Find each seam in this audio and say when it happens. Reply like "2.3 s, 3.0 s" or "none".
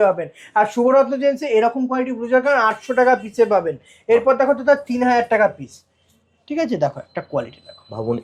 none